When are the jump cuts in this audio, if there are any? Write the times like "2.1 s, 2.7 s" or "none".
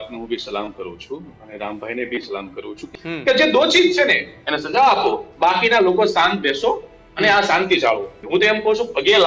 2.8 s, 8.1 s